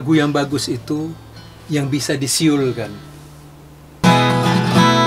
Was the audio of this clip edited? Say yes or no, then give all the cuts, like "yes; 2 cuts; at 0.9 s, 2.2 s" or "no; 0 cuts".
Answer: yes; 1 cut; at 4.0 s